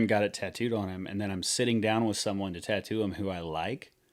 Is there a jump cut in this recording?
no; 0 cuts

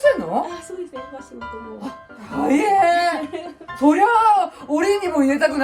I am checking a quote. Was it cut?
no; 0 cuts

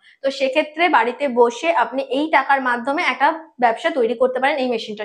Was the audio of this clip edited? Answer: no; 0 cuts

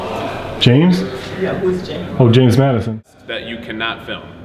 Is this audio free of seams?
no; 1 cut; at 2.9 s

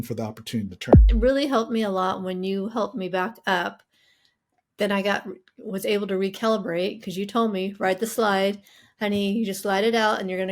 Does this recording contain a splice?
yes; 1 cut; at 1.1 s

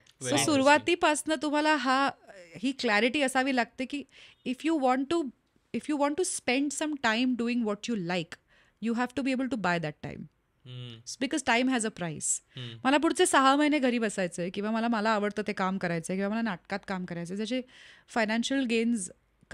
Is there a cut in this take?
no; 0 cuts

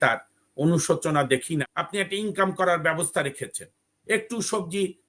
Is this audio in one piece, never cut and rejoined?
no; 1 cut; at 1.8 s

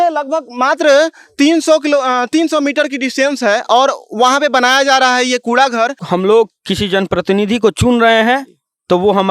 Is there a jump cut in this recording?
yes; 1 cut; at 6.0 s

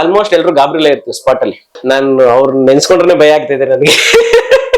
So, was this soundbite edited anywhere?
yes; 1 cut; at 1.8 s

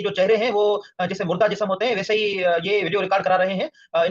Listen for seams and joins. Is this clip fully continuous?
yes; 0 cuts

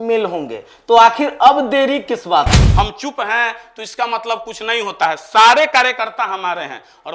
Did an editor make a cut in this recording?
yes; 1 cut; at 2.6 s

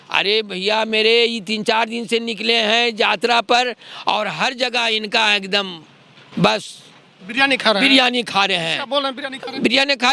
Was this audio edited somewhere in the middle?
no; 0 cuts

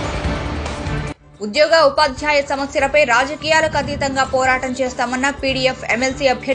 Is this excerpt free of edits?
no; 1 cut; at 1.2 s

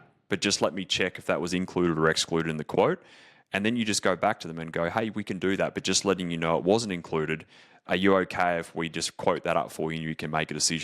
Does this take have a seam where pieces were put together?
yes; 1 cut; at 7.8 s

